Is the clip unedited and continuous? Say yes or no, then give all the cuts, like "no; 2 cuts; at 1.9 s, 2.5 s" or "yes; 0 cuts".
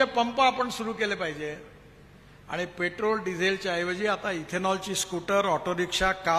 yes; 0 cuts